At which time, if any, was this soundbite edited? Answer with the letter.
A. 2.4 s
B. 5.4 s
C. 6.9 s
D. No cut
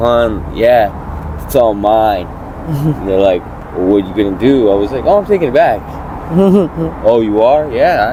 D